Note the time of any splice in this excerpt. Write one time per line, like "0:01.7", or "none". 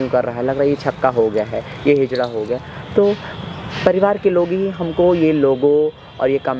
none